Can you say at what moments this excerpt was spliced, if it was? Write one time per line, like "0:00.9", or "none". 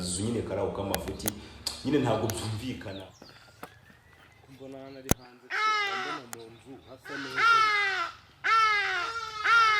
0:02.8